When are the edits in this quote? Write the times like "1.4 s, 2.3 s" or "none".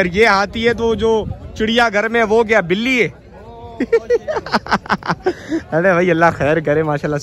none